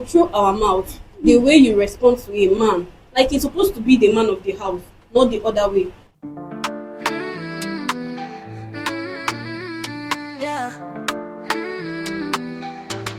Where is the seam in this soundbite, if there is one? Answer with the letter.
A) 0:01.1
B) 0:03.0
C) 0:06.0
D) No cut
C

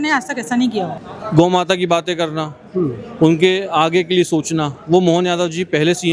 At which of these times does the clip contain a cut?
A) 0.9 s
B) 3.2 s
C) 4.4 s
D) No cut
A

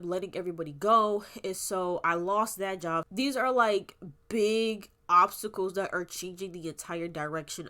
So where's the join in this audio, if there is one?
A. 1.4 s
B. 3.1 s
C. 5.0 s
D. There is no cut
B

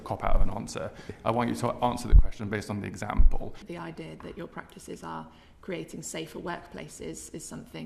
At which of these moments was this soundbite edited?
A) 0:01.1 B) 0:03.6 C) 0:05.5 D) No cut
B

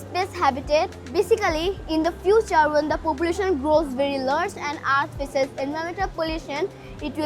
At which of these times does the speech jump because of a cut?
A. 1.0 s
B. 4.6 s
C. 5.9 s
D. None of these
A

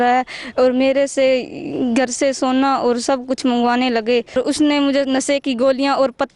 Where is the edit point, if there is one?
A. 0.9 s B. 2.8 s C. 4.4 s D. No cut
C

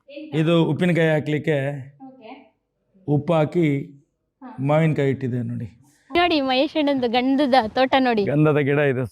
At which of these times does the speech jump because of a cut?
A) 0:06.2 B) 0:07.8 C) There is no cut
A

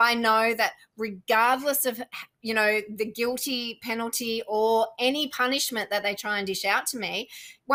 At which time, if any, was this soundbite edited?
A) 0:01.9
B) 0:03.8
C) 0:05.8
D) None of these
D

